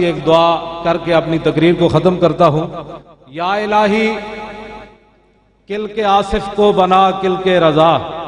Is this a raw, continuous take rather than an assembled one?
yes; 0 cuts

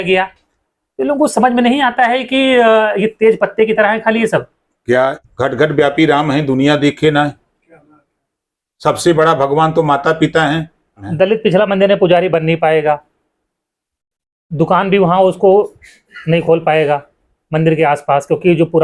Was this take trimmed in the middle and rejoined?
yes; 2 cuts; at 5.2 s, 11.1 s

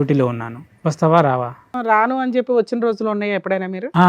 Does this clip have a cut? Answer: yes; 1 cut; at 1.7 s

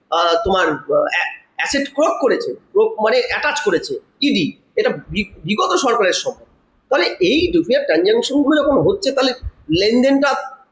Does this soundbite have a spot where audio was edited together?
no; 0 cuts

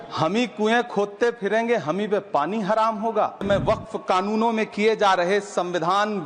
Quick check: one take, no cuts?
no; 1 cut; at 3.4 s

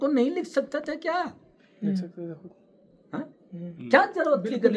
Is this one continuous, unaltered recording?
yes; 0 cuts

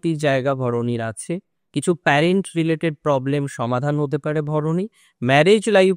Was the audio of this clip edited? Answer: no; 0 cuts

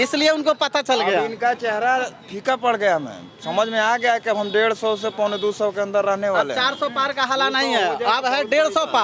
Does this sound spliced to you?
no; 0 cuts

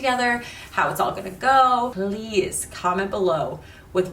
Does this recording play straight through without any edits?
no; 1 cut; at 1.9 s

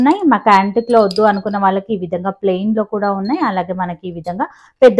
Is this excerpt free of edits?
yes; 0 cuts

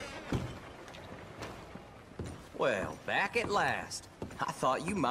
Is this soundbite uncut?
no; 1 cut; at 2.0 s

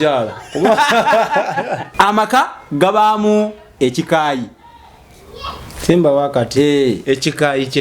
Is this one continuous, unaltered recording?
no; 1 cut; at 1.9 s

